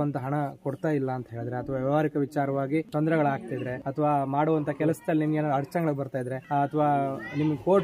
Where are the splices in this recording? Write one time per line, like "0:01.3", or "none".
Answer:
0:02.9
0:03.8
0:06.4